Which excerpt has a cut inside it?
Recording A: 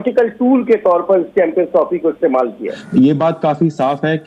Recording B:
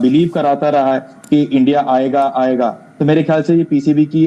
A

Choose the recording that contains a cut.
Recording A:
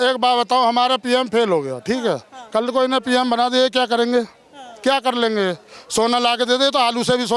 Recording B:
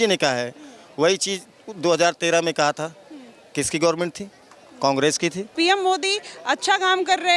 B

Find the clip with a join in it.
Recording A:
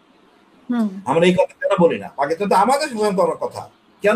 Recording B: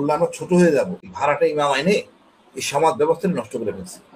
B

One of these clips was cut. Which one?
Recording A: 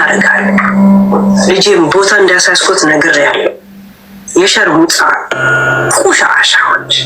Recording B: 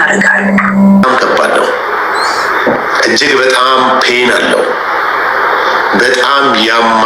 B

